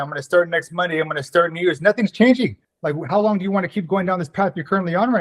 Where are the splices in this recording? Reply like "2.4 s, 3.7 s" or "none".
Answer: 2.7 s